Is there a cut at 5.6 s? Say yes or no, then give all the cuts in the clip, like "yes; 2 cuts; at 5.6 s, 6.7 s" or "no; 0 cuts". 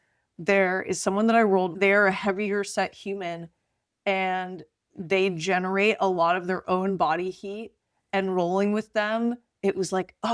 no; 1 cut; at 1.7 s